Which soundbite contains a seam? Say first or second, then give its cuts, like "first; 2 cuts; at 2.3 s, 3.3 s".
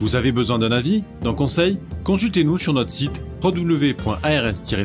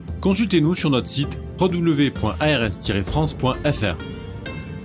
second; 1 cut; at 4.0 s